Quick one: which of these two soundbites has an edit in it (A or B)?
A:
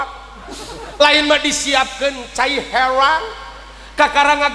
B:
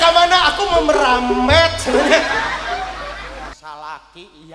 B